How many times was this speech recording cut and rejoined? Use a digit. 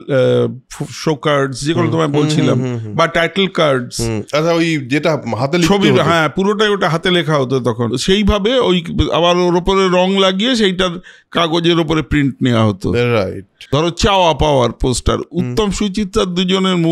2